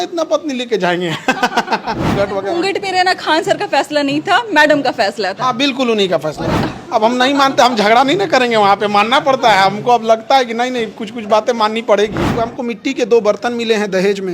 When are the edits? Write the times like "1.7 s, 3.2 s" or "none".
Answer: 2.2 s, 6.6 s, 12.4 s